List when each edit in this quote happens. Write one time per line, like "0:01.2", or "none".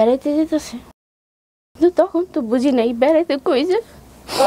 none